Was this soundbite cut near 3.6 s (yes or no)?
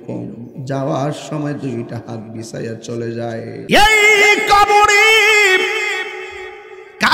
yes